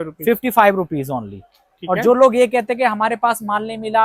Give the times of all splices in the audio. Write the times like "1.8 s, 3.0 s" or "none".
none